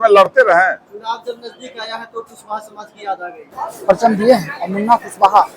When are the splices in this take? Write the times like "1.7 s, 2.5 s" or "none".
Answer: 3.4 s